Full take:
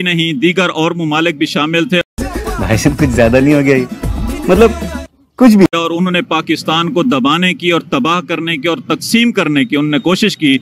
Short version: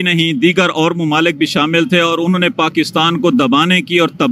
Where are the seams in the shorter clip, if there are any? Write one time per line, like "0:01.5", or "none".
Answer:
0:02.0